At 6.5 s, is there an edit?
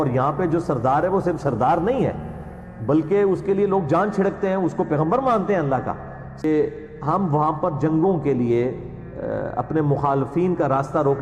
yes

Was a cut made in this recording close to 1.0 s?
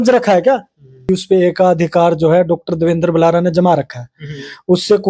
yes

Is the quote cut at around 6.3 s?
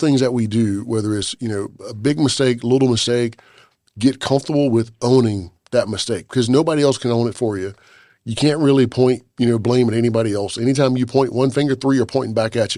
no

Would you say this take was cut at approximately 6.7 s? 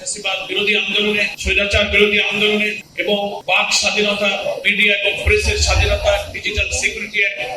no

